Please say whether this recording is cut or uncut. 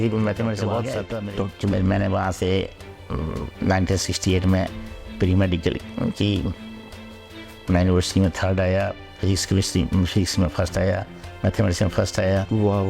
cut